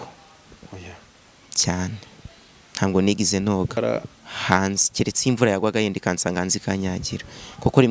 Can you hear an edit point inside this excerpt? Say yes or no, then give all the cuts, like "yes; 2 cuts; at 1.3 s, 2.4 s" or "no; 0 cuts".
yes; 1 cut; at 3.8 s